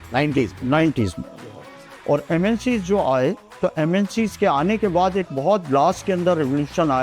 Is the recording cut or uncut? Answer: uncut